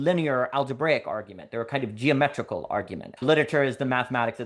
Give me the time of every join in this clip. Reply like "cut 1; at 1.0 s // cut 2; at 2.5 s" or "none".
cut 1; at 3.2 s

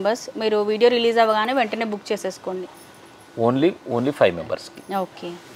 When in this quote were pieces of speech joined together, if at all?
none

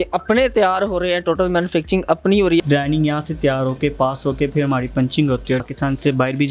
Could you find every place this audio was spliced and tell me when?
cut 1; at 2.6 s // cut 2; at 5.6 s

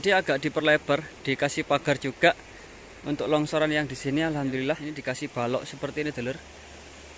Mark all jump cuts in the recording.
cut 1; at 4.9 s

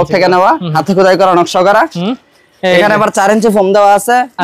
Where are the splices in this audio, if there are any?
none

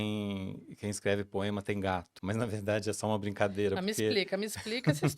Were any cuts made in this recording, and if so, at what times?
cut 1; at 2.1 s

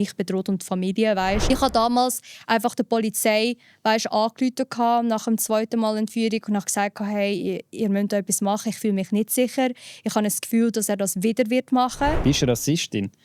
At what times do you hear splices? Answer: cut 1; at 1.5 s // cut 2; at 12.2 s

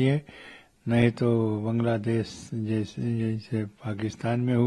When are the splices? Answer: none

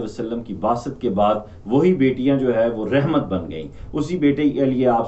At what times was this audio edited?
none

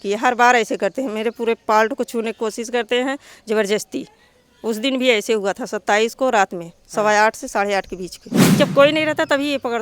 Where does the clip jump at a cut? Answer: cut 1; at 8.6 s

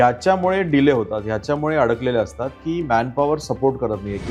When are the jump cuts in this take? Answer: none

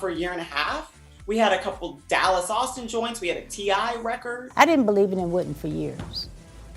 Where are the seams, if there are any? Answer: cut 1; at 4.5 s

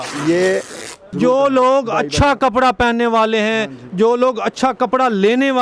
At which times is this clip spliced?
cut 1; at 1.0 s

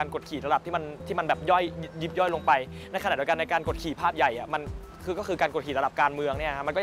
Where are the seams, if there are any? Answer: none

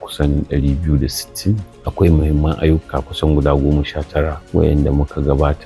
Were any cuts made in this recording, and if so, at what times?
cut 1; at 1.8 s // cut 2; at 4.4 s

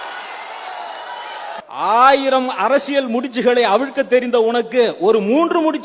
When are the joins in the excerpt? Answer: cut 1; at 1.6 s

